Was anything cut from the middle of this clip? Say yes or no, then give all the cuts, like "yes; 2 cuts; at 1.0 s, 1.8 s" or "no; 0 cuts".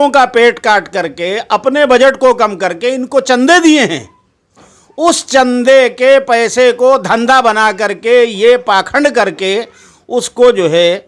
no; 0 cuts